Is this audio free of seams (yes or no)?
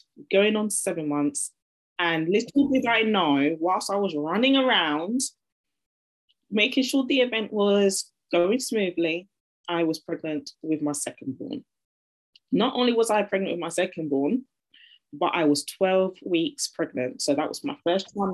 yes